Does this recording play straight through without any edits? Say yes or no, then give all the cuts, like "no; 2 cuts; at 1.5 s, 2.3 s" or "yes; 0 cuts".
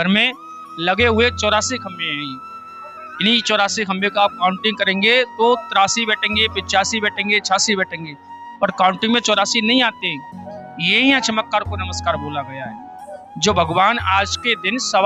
yes; 0 cuts